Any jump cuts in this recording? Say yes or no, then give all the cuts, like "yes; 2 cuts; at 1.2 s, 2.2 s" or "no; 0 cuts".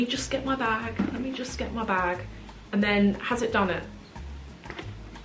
no; 0 cuts